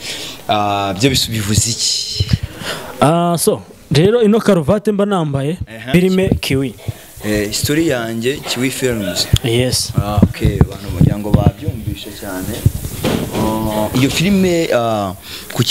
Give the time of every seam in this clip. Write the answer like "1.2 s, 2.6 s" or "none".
5.8 s